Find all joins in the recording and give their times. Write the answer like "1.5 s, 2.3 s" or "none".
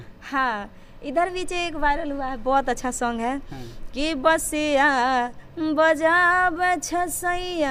none